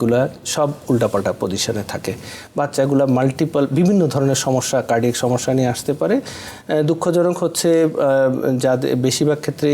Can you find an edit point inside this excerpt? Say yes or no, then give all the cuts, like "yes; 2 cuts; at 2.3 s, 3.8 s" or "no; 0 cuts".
no; 0 cuts